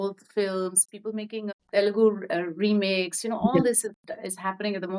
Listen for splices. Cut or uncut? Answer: cut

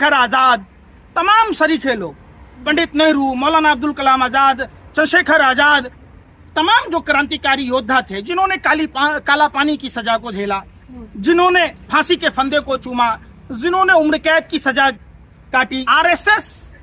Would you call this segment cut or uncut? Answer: cut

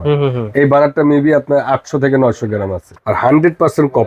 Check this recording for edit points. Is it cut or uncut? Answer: cut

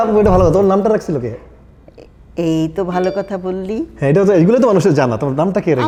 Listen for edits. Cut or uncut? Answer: uncut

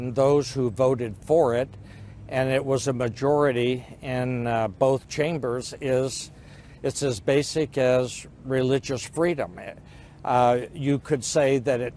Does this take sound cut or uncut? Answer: cut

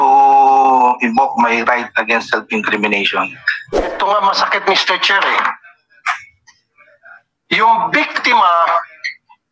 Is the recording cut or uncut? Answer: cut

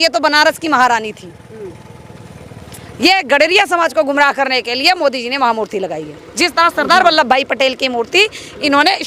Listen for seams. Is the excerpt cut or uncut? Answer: uncut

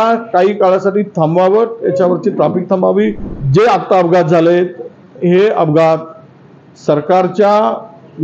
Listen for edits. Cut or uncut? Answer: cut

